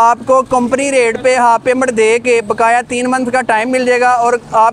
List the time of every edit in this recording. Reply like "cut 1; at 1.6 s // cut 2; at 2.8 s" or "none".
none